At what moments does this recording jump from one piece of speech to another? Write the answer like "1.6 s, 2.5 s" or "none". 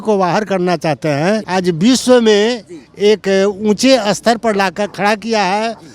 1.5 s